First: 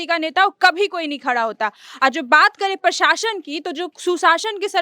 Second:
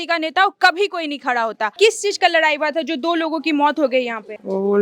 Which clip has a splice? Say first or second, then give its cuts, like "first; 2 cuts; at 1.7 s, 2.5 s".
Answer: second; 1 cut; at 1.7 s